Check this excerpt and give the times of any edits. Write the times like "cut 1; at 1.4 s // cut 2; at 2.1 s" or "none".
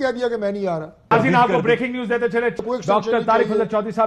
cut 1; at 1.1 s // cut 2; at 2.6 s